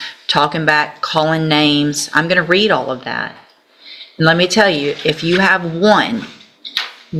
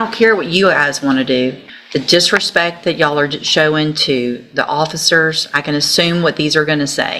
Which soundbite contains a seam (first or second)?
second